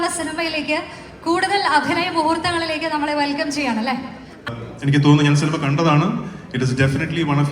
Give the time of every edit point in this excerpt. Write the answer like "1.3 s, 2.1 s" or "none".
4.4 s

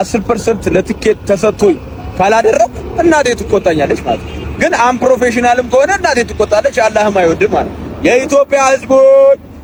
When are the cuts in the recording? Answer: none

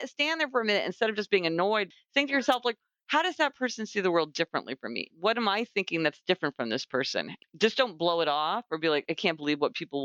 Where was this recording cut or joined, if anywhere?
1.8 s, 5.1 s, 7.3 s, 9.0 s

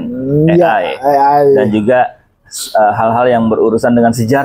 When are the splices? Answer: none

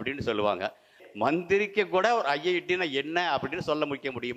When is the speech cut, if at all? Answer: 1.0 s

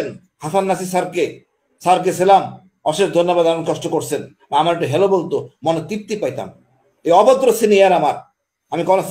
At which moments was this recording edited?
none

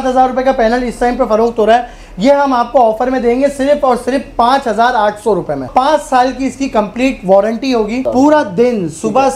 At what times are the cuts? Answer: 5.7 s, 8.0 s

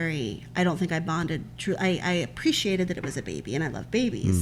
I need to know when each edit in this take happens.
none

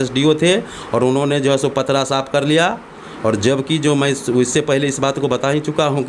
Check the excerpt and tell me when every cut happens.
none

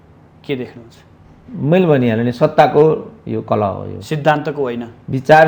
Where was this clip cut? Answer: none

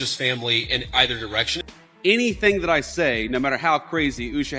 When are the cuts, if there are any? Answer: 1.6 s

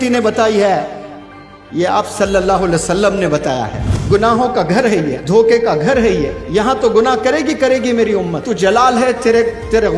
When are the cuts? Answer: 3.9 s, 5.2 s, 6.4 s, 8.5 s

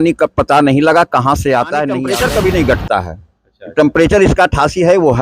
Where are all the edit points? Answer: 2.0 s

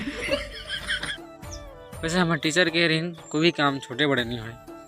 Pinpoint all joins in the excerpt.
1.2 s

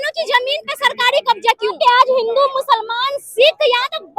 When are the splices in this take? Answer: 1.8 s

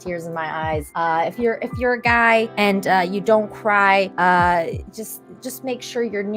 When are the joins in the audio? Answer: 0.9 s, 2.5 s, 4.1 s

